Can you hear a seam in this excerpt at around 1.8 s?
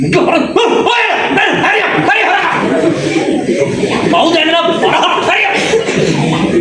no; 0 cuts

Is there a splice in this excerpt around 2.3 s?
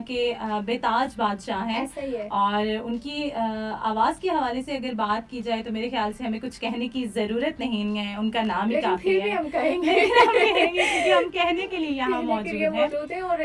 no; 0 cuts

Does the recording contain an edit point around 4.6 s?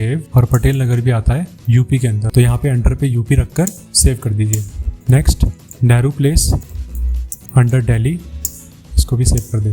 no; 0 cuts

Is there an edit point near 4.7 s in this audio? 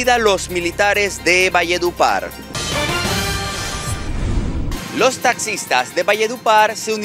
yes; 2 cuts; at 2.4 s, 4.7 s

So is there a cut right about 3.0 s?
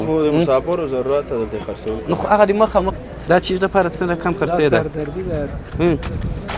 yes; 1 cut; at 3.0 s

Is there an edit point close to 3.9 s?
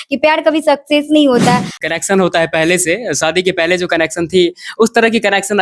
no; 1 cut; at 1.7 s

